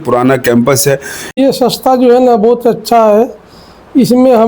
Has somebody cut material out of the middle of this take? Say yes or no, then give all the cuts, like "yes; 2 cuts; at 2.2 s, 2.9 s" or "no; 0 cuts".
yes; 1 cut; at 1.4 s